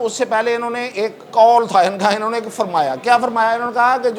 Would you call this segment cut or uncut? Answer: uncut